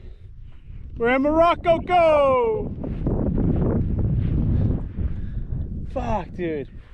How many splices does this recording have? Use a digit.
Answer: 0